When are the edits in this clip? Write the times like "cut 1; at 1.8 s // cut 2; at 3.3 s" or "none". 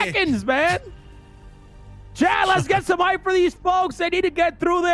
none